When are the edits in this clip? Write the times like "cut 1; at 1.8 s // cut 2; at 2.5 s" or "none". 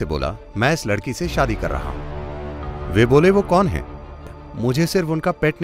cut 1; at 4.4 s